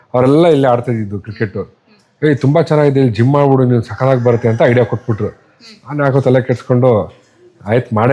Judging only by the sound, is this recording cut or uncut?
uncut